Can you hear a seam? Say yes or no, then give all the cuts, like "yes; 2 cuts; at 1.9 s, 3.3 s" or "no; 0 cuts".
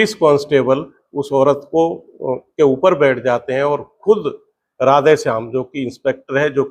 no; 0 cuts